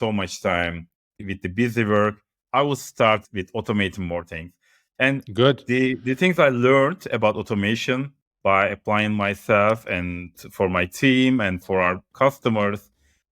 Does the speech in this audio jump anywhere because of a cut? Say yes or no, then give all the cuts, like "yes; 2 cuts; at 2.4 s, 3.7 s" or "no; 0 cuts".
yes; 2 cuts; at 1.2 s, 10.3 s